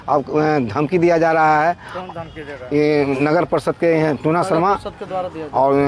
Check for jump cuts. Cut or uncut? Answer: uncut